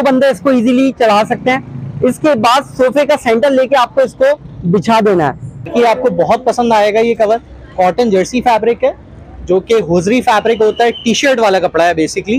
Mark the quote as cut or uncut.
cut